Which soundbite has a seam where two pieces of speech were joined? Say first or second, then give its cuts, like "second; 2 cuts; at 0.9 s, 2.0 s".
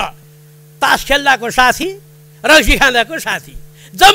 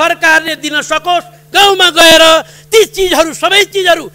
second; 1 cut; at 1.5 s